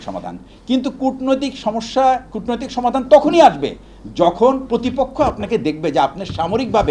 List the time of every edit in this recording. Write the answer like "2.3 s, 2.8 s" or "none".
none